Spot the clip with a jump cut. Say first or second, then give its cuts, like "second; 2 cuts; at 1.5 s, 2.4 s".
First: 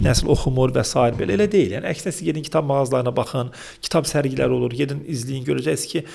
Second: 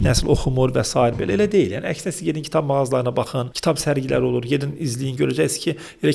second; 1 cut; at 3.4 s